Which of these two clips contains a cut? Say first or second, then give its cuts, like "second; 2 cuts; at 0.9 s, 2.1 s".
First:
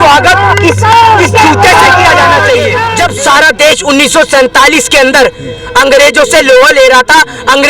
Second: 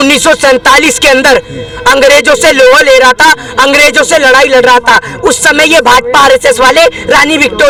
first; 1 cut; at 2.9 s